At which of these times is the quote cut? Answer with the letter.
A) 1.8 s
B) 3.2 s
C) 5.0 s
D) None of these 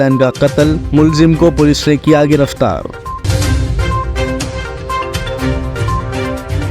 B